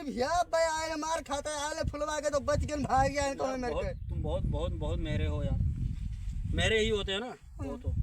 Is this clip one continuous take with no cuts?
yes; 0 cuts

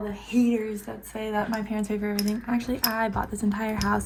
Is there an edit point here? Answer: no; 0 cuts

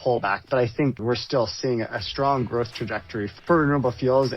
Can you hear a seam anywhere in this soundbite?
yes; 1 cut; at 3.4 s

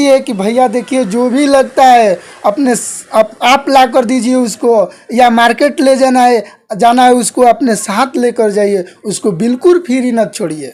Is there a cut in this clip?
no; 0 cuts

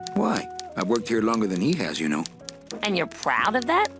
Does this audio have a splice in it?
no; 0 cuts

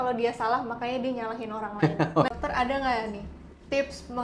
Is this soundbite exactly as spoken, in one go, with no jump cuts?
no; 1 cut; at 2.3 s

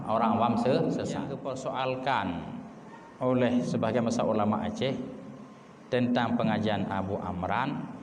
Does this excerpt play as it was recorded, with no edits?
no; 1 cut; at 1.5 s

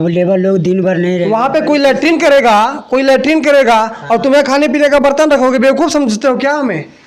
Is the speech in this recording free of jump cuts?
yes; 0 cuts

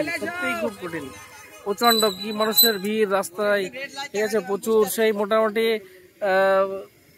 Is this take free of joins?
yes; 0 cuts

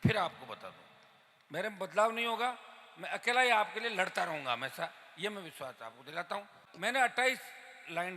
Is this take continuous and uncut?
no; 1 cut; at 6.6 s

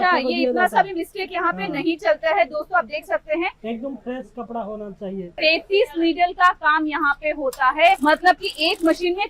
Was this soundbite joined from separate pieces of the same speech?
yes; 2 cuts; at 5.3 s, 8.0 s

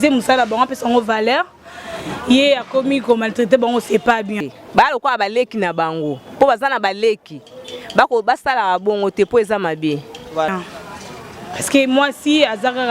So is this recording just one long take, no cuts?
no; 2 cuts; at 4.4 s, 10.5 s

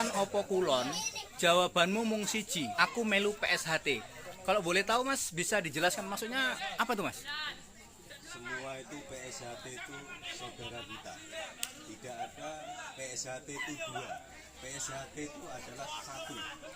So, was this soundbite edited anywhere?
yes; 1 cut; at 2.9 s

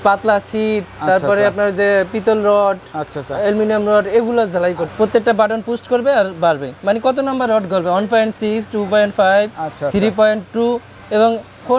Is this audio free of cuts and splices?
no; 1 cut; at 4.8 s

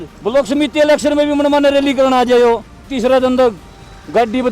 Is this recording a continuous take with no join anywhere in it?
no; 1 cut; at 2.9 s

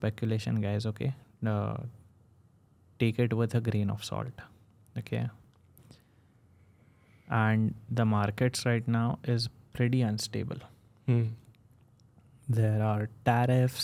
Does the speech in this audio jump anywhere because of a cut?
no; 0 cuts

